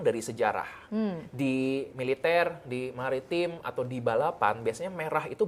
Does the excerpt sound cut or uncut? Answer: uncut